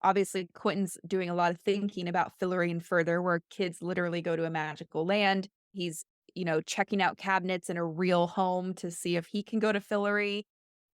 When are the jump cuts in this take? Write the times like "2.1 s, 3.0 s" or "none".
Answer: 5.8 s